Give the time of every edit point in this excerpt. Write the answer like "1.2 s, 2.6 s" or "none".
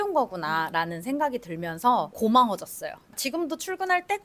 none